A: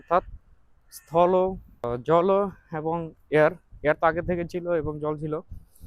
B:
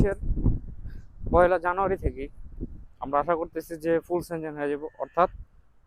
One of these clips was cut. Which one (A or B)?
A